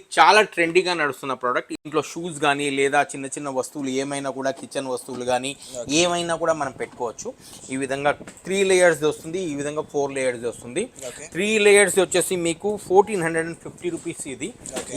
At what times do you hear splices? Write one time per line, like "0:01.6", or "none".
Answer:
0:01.8